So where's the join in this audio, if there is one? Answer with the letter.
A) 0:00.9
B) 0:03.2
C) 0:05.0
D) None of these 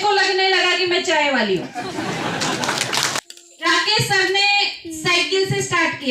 B